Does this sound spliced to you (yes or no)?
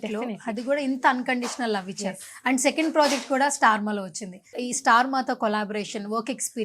yes